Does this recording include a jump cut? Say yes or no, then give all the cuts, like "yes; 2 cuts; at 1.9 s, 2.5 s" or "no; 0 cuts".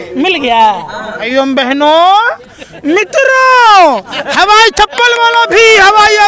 yes; 1 cut; at 1.1 s